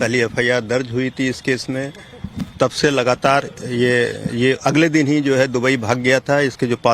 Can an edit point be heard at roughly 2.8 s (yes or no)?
no